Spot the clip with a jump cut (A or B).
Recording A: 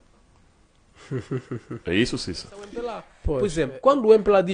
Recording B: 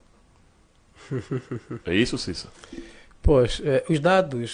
A